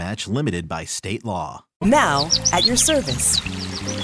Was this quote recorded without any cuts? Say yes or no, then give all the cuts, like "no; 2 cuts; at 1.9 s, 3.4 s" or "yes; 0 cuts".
no; 1 cut; at 1.7 s